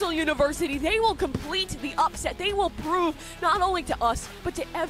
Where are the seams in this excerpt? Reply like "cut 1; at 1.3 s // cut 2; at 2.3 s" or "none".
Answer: none